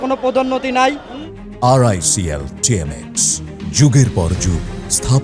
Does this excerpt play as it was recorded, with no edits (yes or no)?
yes